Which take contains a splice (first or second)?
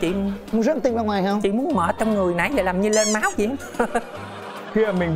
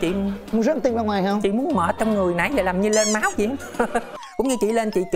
second